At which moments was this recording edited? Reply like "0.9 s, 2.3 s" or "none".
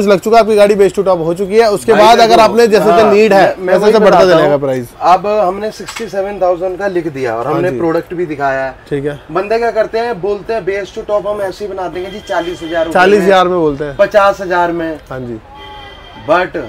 none